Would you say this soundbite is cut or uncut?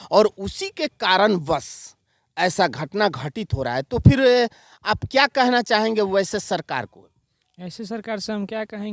uncut